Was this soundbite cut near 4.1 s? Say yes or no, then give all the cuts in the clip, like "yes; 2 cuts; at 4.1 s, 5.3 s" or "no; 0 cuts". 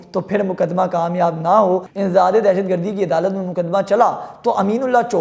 no; 1 cut; at 1.9 s